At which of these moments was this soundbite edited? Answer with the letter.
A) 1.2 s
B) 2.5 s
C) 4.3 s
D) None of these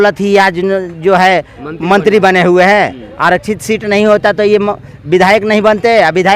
D